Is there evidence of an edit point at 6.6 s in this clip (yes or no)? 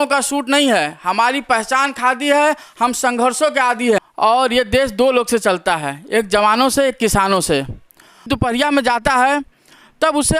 no